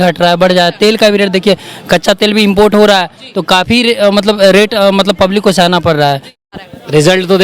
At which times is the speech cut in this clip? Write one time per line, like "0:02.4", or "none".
0:06.4